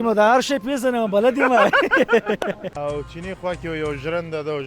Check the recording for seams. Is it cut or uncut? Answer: cut